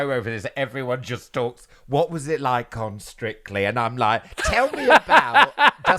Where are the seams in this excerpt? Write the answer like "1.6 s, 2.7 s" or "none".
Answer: none

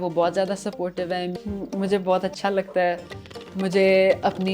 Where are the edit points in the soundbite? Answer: 1.3 s

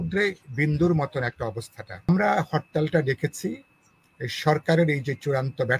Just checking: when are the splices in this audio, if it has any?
2.1 s

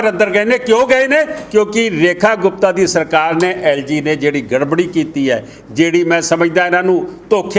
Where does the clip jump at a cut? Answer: none

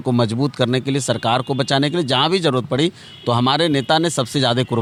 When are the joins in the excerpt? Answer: none

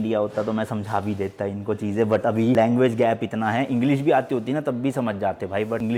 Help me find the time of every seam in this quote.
none

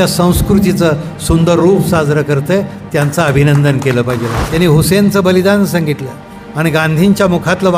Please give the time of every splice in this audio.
4.4 s

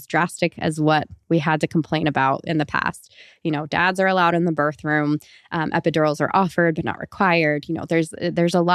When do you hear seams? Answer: none

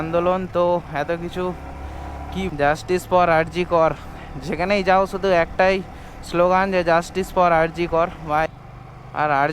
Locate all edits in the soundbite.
2.5 s, 8.5 s

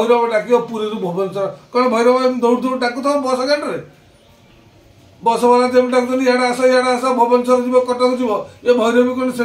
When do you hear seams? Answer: none

